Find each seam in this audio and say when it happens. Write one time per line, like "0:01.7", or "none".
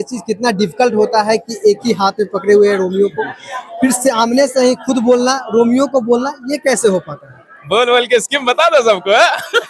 none